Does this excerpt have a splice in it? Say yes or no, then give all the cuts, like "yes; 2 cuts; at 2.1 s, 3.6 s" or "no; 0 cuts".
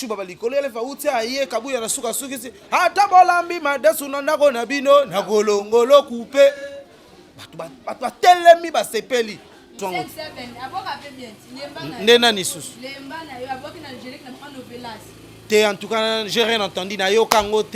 yes; 1 cut; at 9.8 s